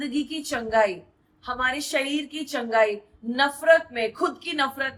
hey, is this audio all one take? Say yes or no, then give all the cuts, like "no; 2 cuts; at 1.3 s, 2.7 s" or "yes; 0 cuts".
yes; 0 cuts